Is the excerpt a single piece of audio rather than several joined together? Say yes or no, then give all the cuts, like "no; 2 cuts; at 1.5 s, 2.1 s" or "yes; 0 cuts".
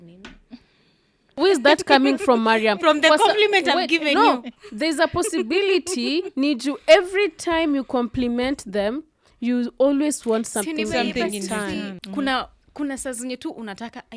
no; 2 cuts; at 1.4 s, 12.0 s